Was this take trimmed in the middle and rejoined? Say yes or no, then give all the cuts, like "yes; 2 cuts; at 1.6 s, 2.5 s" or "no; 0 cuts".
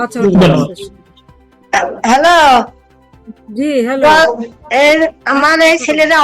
yes; 1 cut; at 1.6 s